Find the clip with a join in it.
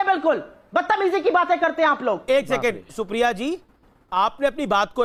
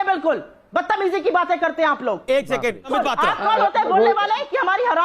second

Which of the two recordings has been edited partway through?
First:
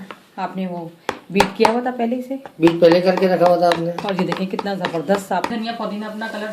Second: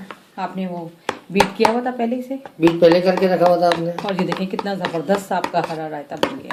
first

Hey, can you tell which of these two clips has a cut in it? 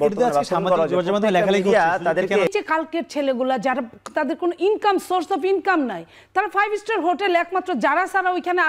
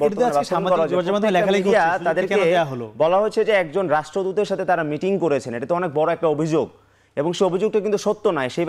first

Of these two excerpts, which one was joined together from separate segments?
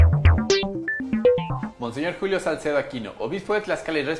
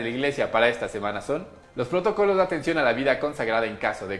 first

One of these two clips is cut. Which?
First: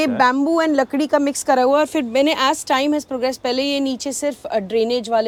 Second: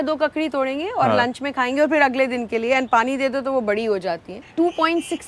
second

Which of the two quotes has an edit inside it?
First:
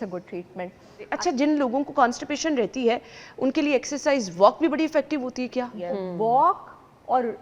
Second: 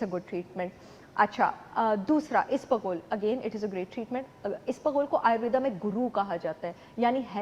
first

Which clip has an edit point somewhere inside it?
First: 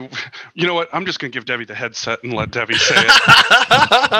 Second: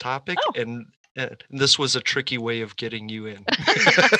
first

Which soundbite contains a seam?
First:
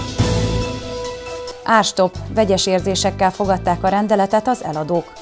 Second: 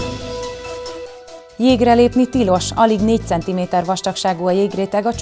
first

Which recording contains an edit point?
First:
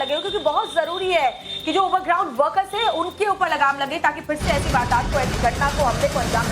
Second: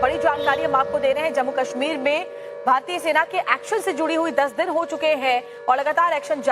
first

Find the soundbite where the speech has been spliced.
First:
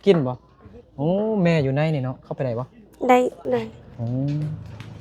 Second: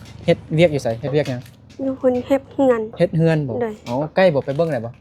first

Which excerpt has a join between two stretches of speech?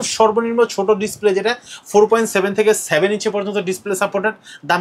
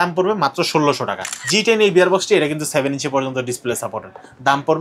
second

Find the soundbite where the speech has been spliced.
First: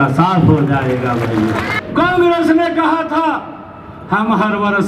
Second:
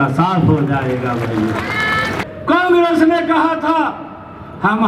first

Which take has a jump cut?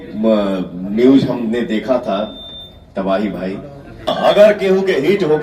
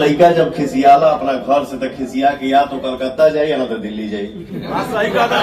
first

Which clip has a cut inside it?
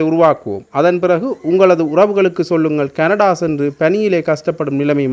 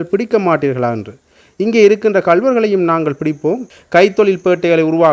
second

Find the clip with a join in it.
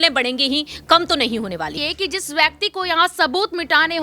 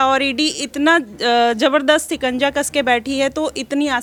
first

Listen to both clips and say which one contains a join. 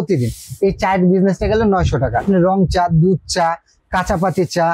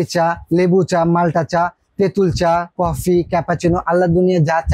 first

